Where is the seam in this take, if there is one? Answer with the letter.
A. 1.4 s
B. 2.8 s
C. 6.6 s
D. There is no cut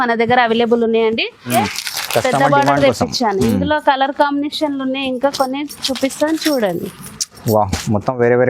A